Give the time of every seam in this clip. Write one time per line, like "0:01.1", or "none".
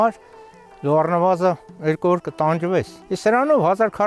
0:03.0

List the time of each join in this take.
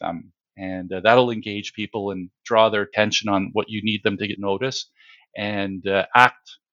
0:02.9
0:04.4

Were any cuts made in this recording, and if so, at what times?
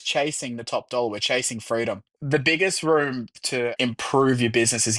0:02.1
0:03.7

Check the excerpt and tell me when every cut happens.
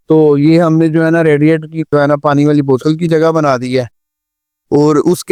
none

